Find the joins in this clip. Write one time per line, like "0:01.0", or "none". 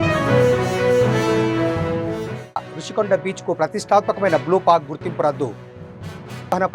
0:02.4